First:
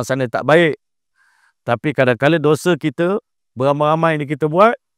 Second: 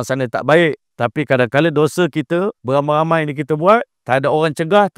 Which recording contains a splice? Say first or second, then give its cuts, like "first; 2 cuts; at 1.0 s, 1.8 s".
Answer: second; 3 cuts; at 0.9 s, 2.6 s, 3.9 s